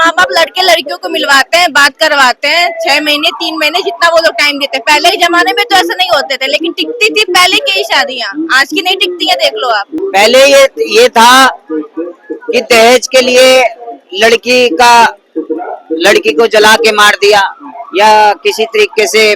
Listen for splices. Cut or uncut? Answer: cut